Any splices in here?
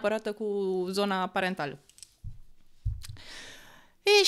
no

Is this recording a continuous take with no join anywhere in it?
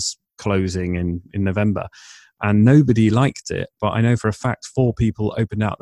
yes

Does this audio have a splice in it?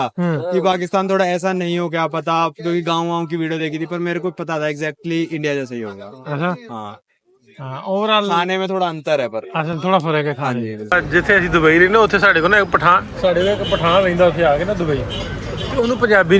yes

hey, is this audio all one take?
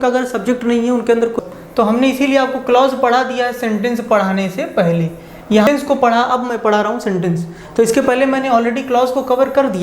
no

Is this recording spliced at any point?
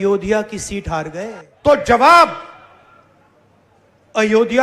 yes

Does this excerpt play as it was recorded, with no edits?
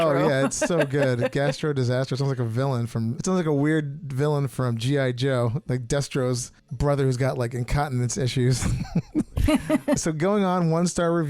no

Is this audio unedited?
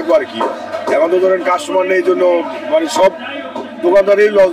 yes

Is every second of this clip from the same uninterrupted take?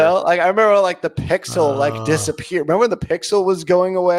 yes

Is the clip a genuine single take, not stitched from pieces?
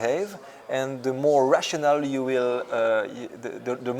yes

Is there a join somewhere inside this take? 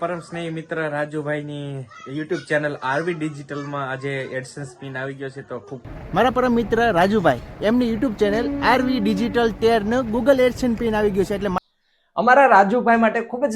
yes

